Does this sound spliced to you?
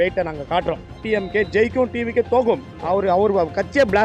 yes; 2 cuts; at 1.0 s, 2.7 s

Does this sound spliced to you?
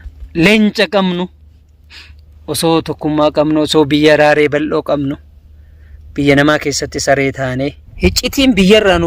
yes; 1 cut; at 7.8 s

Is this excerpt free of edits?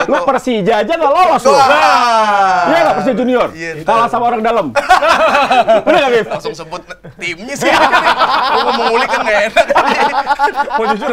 yes; 0 cuts

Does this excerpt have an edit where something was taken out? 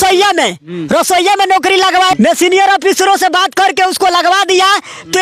yes; 1 cut; at 2.1 s

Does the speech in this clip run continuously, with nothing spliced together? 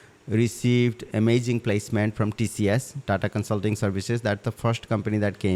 yes; 0 cuts

